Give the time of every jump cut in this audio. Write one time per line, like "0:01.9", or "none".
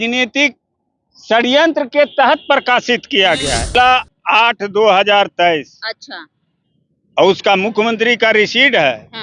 0:03.7